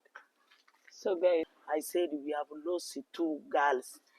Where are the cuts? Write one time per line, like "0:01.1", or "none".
0:01.5